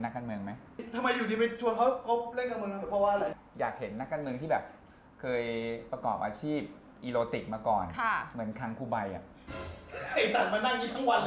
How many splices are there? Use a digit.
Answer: 0